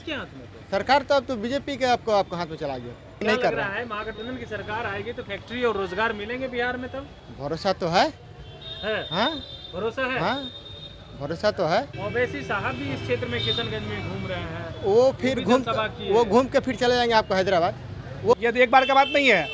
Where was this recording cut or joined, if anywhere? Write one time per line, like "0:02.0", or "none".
0:03.2
0:11.9
0:18.4